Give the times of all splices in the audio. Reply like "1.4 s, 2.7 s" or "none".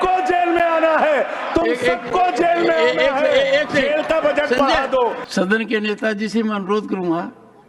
5.2 s